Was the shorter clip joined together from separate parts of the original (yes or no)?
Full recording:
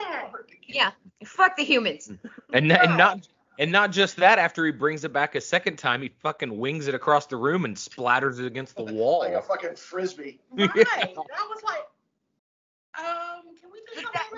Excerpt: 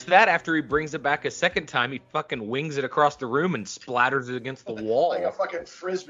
no